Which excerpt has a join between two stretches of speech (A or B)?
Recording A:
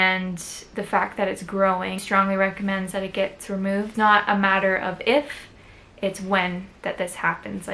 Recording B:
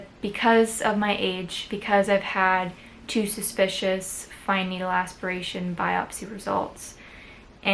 A